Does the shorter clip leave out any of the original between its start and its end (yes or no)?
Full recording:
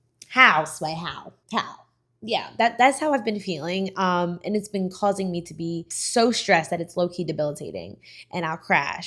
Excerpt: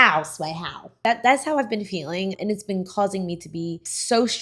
yes